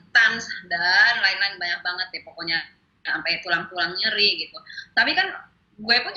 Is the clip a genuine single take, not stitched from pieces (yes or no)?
yes